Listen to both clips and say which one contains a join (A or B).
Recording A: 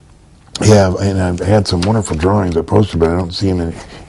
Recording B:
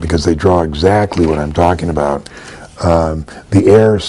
A